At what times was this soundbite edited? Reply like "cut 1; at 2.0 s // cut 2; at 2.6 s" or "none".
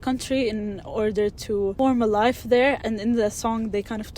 cut 1; at 1.7 s // cut 2; at 2.8 s